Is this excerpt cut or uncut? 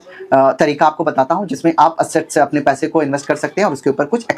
uncut